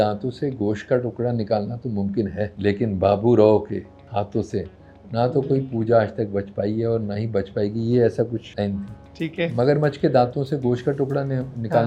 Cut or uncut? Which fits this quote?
cut